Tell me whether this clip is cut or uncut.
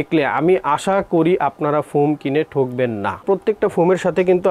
cut